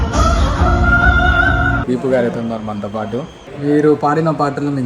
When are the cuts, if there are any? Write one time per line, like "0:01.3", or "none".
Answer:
0:01.8
0:03.4